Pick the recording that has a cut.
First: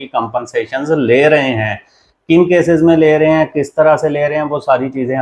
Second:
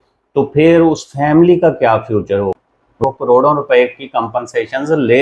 second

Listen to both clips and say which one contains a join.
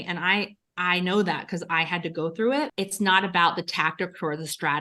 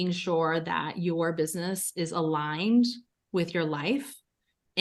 first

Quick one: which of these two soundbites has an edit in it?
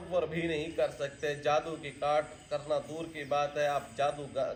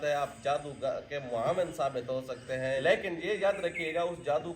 second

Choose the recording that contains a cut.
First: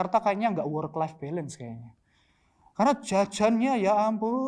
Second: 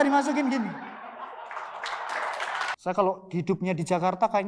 second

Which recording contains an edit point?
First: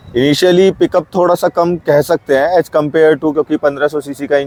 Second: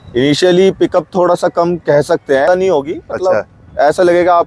second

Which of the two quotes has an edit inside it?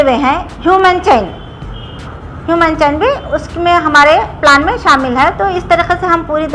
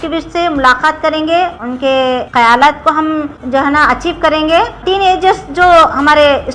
second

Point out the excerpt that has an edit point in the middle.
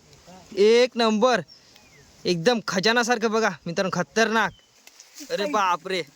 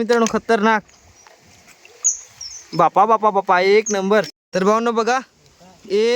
second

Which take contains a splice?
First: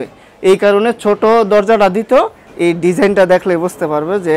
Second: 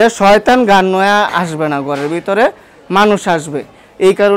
first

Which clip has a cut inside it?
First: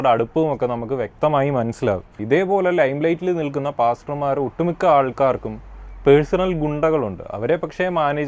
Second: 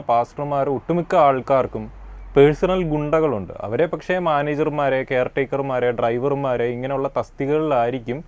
first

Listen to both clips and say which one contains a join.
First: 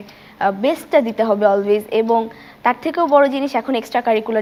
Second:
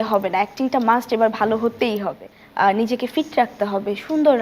second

